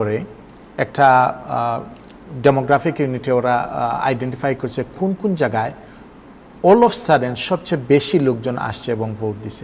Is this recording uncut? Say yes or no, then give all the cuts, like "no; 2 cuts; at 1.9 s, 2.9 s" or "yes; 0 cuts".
yes; 0 cuts